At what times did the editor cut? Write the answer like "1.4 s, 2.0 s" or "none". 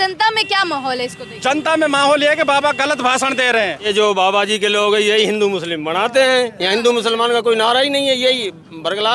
3.8 s